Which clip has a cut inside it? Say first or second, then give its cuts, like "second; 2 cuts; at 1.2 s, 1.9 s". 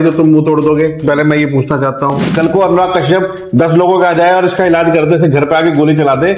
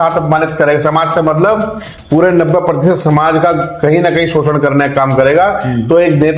first; 1 cut; at 2.2 s